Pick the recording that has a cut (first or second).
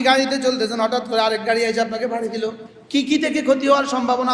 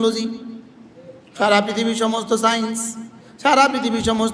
first